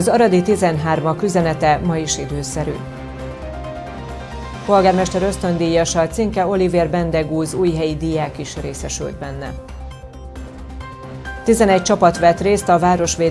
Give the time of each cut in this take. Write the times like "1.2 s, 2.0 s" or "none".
2.8 s, 4.2 s